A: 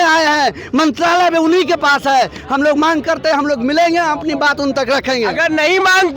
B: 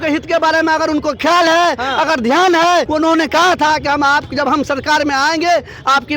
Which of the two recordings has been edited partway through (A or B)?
B